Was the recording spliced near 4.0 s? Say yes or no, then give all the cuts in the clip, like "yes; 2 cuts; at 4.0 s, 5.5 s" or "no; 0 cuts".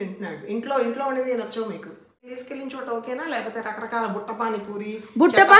no; 1 cut; at 2.4 s